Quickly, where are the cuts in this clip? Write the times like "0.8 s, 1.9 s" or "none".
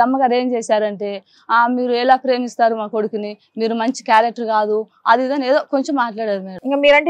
none